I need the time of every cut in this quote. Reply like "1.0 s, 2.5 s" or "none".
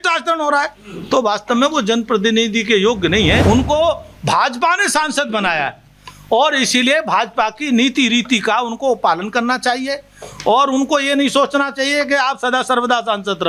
3.4 s